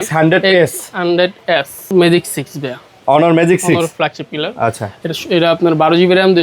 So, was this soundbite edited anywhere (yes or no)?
yes